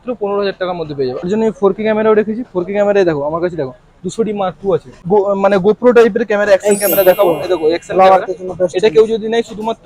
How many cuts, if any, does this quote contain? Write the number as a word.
two